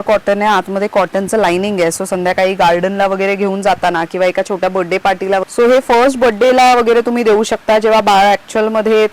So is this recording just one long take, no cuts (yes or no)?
no